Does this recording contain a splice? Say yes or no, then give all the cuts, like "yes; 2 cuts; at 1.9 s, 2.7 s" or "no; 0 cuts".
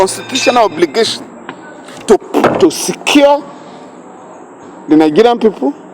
no; 0 cuts